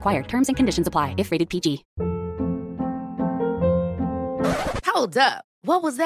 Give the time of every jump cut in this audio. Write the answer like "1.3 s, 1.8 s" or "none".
1.9 s